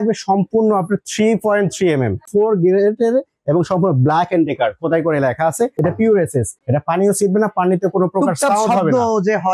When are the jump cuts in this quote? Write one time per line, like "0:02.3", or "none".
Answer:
0:02.3
0:05.7
0:06.6